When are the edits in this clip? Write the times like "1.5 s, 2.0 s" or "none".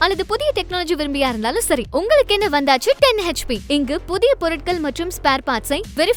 none